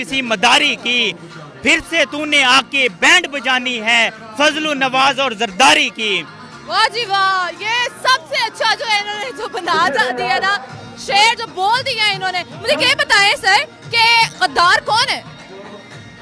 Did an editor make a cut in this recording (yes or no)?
no